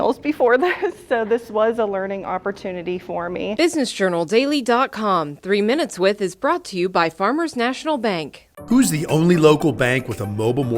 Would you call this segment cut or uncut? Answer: cut